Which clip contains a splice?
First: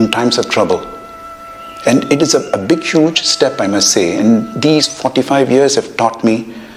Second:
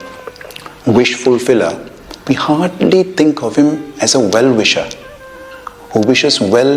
second; 1 cut; at 2.2 s

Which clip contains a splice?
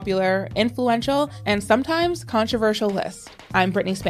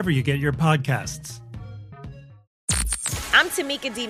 second; 1 cut; at 2.4 s

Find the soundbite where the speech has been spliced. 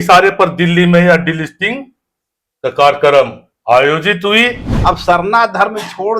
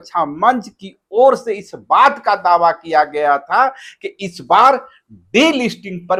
first; 1 cut; at 4.7 s

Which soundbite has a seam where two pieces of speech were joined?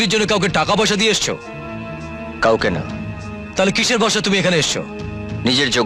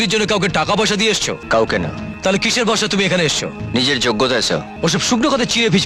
second; 4 cuts; at 1.4 s, 2.1 s, 3.6 s, 4.7 s

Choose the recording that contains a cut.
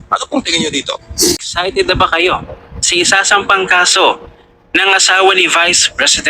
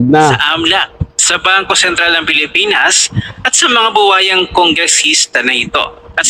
first; 1 cut; at 1.5 s

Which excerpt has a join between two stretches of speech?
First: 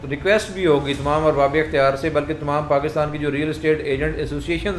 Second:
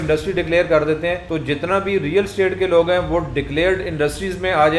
second; 1 cut; at 1.2 s

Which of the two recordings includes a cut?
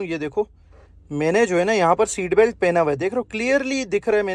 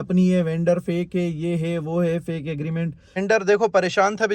second; 1 cut; at 3.1 s

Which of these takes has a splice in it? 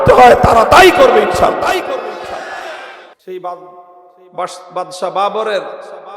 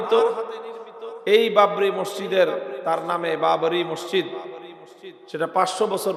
first; 1 cut; at 3.1 s

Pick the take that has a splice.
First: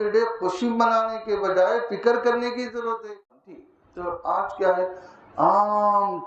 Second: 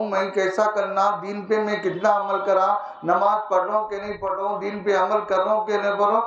first; 1 cut; at 3.6 s

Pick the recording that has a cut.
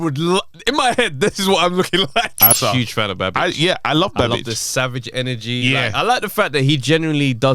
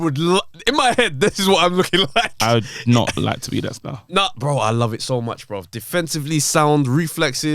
first; 1 cut; at 2.5 s

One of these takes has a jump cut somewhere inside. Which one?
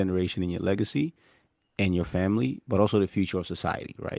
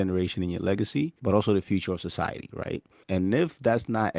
second; 2 cuts; at 1.2 s, 2.9 s

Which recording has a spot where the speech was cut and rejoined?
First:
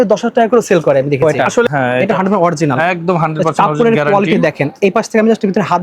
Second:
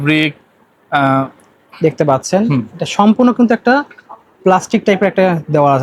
first; 1 cut; at 1.2 s

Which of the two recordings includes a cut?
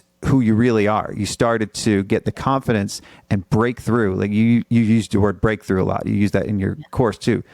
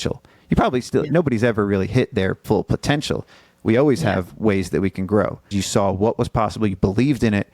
second; 1 cut; at 5.5 s

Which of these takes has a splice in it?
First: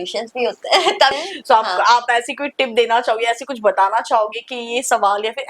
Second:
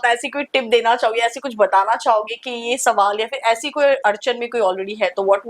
first; 1 cut; at 1.1 s

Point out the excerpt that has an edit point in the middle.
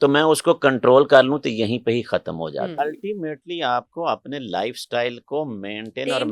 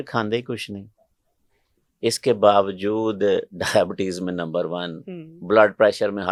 first; 1 cut; at 2.8 s

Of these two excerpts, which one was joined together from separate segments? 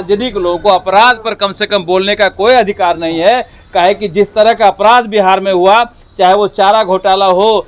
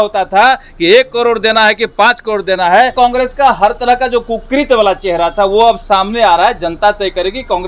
second; 1 cut; at 2.9 s

